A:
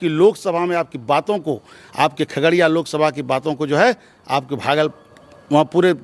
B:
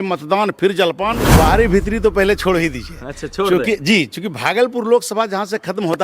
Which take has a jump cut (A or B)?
B